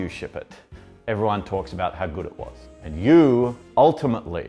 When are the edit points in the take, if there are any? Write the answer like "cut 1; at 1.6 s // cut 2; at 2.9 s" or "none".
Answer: cut 1; at 2.7 s